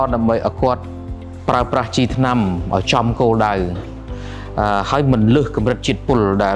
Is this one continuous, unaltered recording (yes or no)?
yes